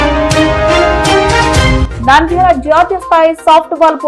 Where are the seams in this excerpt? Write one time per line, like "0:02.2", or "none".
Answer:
0:01.8